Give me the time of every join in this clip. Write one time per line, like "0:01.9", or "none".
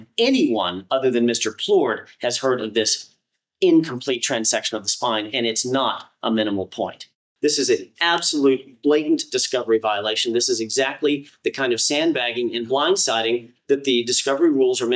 0:07.2